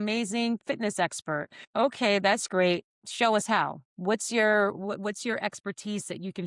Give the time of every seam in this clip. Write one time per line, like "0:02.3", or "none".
0:01.6
0:03.0
0:03.9